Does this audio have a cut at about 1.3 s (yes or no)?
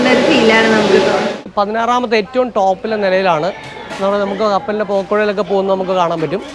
yes